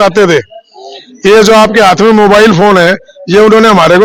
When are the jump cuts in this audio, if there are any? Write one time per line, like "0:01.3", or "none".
none

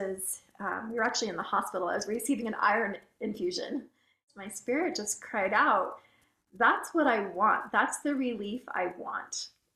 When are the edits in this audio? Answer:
0:04.3

